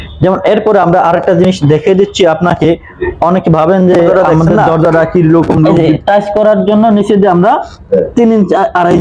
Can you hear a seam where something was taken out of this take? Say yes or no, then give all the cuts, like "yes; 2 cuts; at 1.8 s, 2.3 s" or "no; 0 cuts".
yes; 1 cut; at 5.7 s